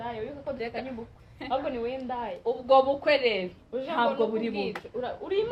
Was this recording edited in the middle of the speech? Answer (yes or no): no